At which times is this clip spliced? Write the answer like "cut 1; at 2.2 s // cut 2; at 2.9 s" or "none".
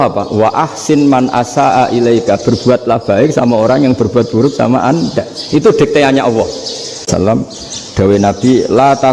cut 1; at 7.1 s